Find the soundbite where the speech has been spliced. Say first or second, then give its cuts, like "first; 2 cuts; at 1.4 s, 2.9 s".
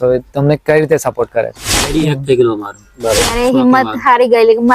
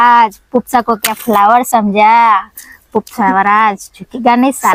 first; 1 cut; at 1.9 s